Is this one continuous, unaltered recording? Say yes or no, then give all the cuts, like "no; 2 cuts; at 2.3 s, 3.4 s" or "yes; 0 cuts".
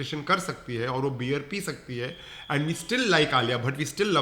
yes; 0 cuts